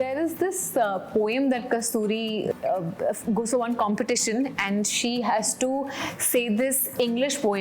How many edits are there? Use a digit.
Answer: 1